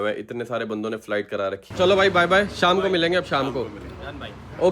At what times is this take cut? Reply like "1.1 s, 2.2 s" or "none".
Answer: 1.6 s